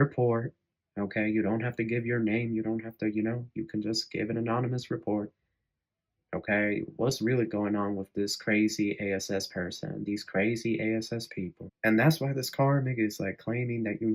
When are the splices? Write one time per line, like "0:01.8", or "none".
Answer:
0:11.6